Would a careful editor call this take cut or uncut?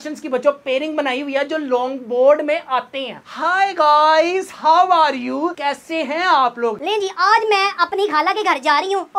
cut